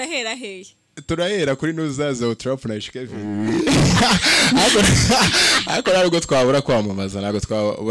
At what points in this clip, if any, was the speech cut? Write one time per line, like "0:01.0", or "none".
0:03.3